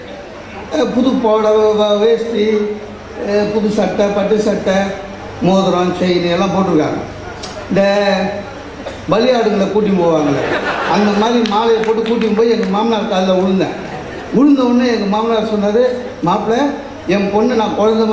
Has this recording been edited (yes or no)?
no